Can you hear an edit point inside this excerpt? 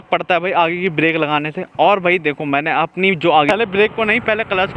yes; 1 cut; at 3.5 s

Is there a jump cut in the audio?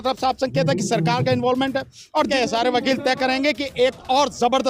yes; 1 cut; at 2.3 s

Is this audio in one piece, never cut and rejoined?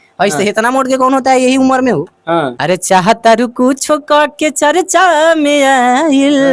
no; 1 cut; at 2.5 s

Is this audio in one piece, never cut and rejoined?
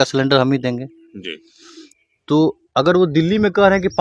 yes; 0 cuts

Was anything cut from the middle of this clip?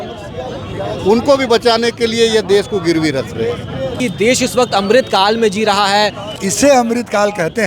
yes; 2 cuts; at 4.0 s, 6.3 s

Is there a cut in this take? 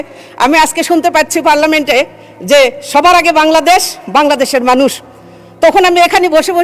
no; 0 cuts

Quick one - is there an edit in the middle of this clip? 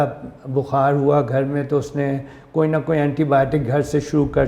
no; 0 cuts

